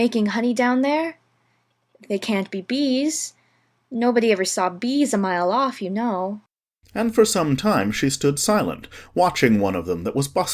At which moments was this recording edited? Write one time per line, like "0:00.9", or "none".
0:06.3